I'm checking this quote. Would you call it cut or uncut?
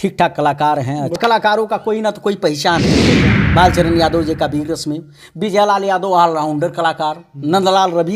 cut